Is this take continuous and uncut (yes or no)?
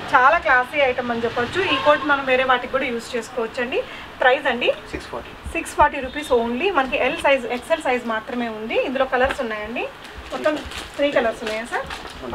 yes